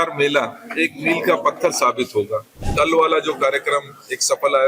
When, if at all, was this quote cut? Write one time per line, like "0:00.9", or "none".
0:02.6